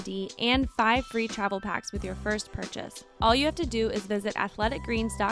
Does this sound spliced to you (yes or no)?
yes